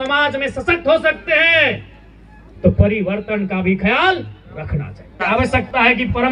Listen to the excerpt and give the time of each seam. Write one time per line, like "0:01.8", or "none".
0:05.2